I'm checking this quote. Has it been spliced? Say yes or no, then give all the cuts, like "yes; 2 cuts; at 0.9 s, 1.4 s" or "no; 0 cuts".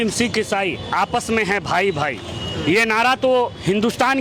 no; 0 cuts